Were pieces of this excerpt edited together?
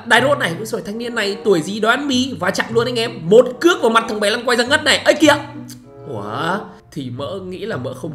yes; 1 cut; at 6.8 s

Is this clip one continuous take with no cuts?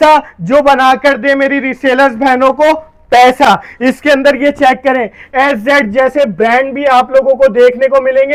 yes; 0 cuts

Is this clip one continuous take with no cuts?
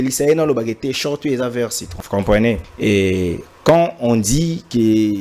no; 2 cuts; at 1.9 s, 2.7 s

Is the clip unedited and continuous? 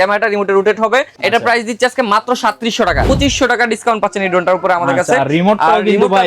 no; 2 cuts; at 1.1 s, 3.1 s

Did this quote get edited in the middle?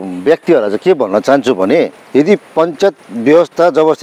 yes; 1 cut; at 2.0 s

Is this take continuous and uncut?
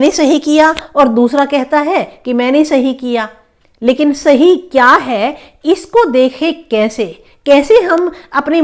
yes; 0 cuts

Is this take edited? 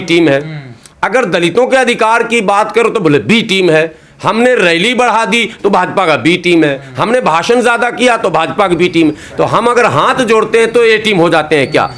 no; 0 cuts

